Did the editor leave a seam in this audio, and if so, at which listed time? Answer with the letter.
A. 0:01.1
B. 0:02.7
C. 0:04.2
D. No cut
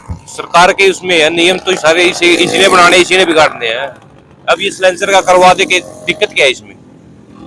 D